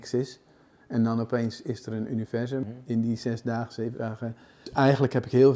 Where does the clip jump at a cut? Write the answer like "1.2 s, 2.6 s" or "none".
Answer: 2.6 s, 4.7 s